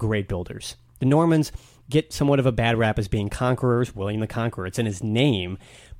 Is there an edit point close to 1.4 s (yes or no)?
no